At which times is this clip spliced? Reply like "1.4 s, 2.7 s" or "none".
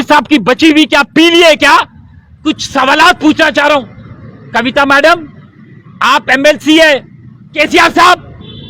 2.4 s, 7.5 s